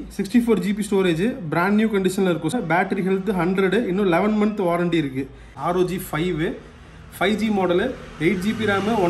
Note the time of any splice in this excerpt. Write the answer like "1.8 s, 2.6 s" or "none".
2.6 s, 5.5 s